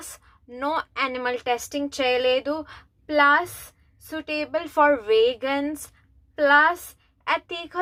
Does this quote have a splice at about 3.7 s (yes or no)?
no